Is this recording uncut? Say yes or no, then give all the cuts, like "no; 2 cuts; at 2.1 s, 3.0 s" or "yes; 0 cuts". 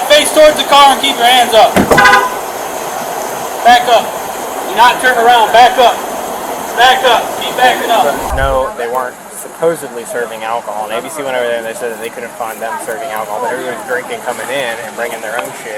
no; 1 cut; at 8.3 s